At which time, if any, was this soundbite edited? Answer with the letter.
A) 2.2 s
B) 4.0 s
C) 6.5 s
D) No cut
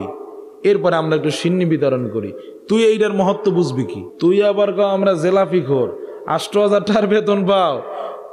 B